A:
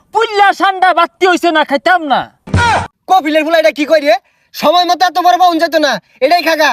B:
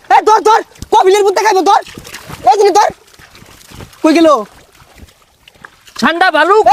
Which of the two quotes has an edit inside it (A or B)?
A